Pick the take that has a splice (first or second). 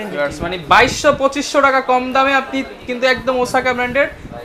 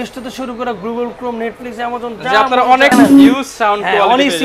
second